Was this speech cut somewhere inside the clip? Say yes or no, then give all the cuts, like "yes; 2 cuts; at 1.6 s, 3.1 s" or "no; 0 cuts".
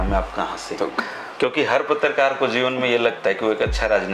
yes; 1 cut; at 0.9 s